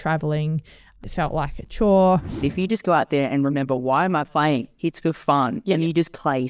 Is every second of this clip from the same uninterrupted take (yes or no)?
no